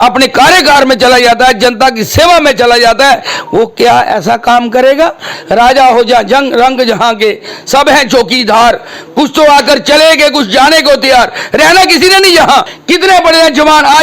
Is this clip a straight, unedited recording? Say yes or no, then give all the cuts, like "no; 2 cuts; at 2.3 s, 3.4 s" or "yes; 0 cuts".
no; 2 cuts; at 5.3 s, 12.8 s